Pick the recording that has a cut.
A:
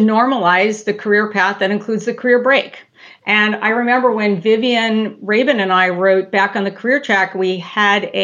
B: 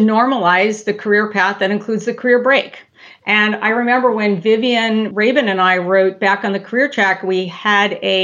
B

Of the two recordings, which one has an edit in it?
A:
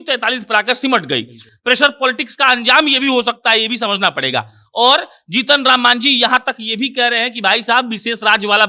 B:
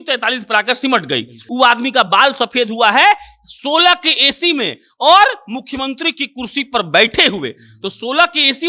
B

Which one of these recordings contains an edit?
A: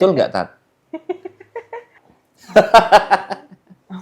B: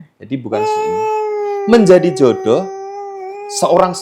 A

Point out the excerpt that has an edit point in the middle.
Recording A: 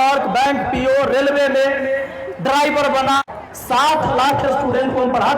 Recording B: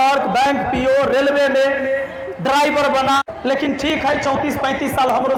A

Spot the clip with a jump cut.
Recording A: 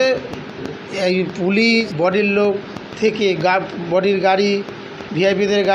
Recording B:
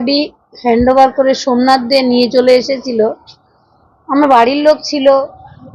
A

